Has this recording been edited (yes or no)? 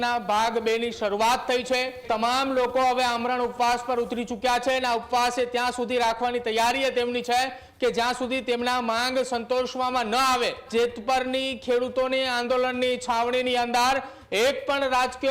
yes